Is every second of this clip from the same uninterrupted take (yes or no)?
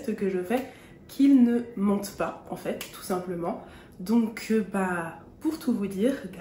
yes